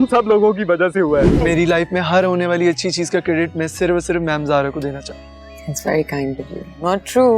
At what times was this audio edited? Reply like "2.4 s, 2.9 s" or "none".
1.3 s